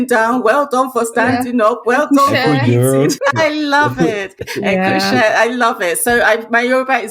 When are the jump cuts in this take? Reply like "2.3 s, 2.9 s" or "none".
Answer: 3.2 s, 4.5 s